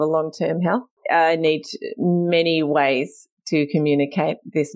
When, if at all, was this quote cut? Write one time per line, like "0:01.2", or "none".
0:00.9